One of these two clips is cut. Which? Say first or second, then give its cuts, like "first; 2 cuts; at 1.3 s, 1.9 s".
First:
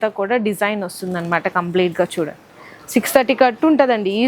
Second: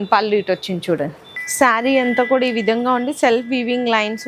second; 1 cut; at 1.2 s